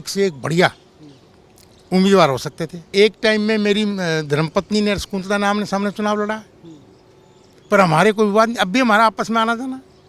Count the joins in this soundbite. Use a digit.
1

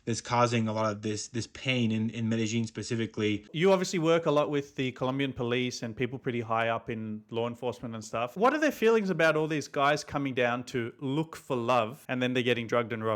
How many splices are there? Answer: 3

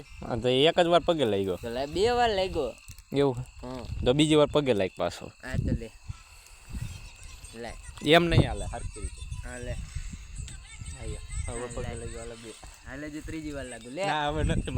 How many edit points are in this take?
0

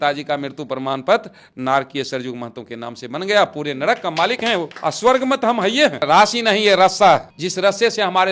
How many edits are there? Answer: 3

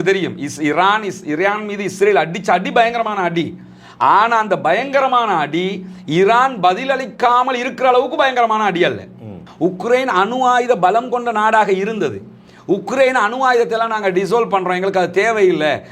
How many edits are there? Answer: 1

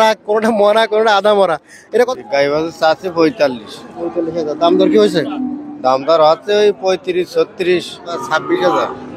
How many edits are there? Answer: 2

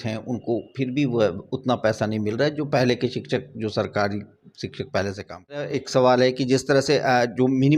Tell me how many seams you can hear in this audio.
1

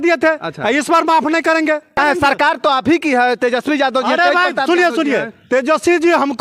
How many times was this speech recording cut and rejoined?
0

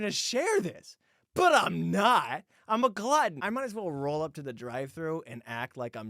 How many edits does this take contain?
1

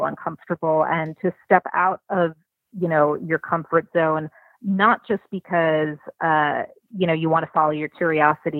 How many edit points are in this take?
0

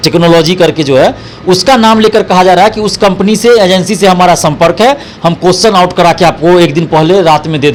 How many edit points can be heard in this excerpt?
0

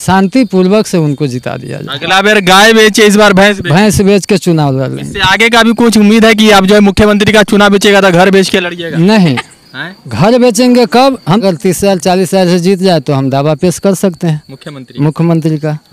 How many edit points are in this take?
1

